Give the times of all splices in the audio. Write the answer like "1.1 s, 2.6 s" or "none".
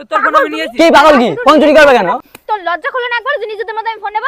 2.2 s